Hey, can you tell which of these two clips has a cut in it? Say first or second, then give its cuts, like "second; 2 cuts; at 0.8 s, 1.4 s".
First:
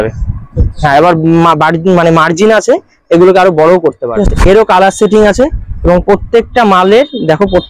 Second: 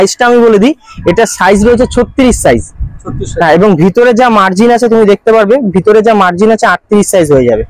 first; 1 cut; at 4.0 s